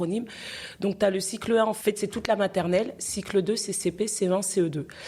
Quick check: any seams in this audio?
yes; 1 cut; at 1.8 s

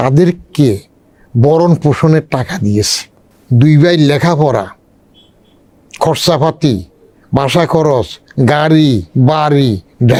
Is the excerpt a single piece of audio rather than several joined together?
yes; 0 cuts

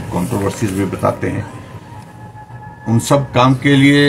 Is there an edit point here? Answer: no; 0 cuts

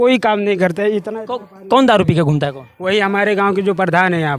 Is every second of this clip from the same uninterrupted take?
yes; 0 cuts

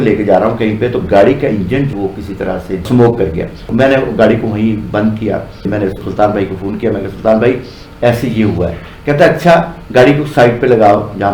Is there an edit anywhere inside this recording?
no; 0 cuts

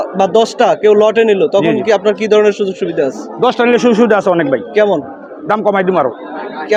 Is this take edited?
no; 0 cuts

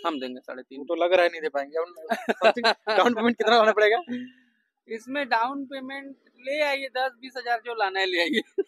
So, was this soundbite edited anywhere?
no; 0 cuts

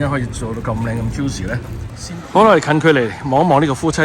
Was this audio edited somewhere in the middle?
yes; 1 cut; at 2.0 s

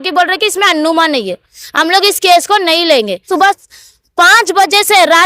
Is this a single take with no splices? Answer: no; 1 cut; at 3.2 s

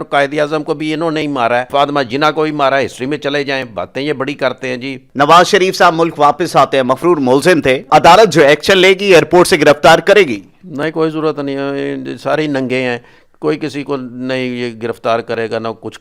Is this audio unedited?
no; 3 cuts; at 1.7 s, 5.0 s, 7.9 s

